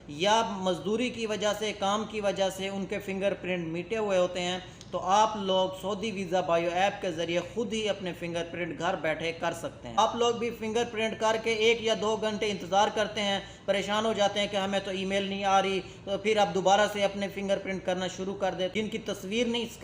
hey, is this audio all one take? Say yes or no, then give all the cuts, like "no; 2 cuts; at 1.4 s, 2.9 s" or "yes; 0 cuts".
no; 2 cuts; at 9.9 s, 18.7 s